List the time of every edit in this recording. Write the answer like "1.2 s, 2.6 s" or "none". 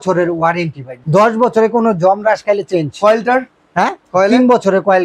0.9 s